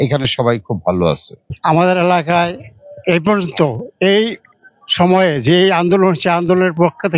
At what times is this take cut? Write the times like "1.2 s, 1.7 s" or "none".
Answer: none